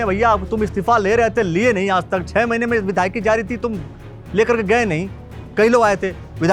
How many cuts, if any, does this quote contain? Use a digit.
0